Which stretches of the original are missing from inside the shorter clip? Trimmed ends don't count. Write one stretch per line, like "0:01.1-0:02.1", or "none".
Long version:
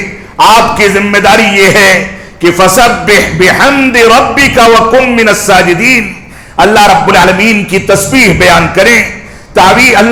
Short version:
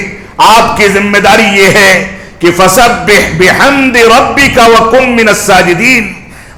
none